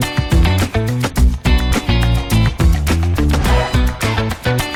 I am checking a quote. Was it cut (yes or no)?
no